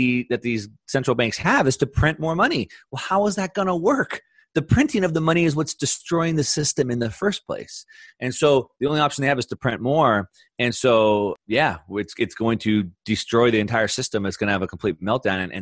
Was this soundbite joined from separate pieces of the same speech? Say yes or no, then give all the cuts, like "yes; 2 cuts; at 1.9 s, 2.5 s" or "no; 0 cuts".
yes; 1 cut; at 11.4 s